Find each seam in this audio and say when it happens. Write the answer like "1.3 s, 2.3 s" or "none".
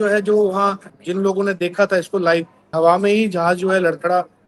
0.9 s, 2.7 s